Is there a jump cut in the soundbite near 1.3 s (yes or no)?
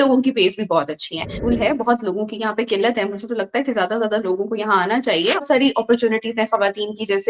yes